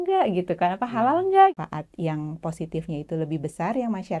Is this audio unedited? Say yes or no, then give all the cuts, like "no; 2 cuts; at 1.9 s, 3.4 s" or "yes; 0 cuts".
no; 1 cut; at 1.5 s